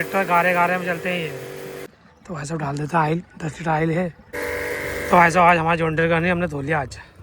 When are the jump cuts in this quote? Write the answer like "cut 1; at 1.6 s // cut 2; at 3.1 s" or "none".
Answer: cut 1; at 1.9 s // cut 2; at 4.2 s